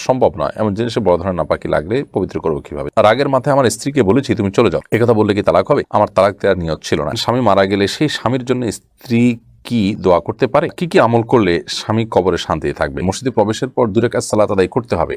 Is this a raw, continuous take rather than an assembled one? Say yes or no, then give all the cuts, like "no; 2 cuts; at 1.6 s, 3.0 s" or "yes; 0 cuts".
no; 3 cuts; at 2.8 s, 7.2 s, 13.0 s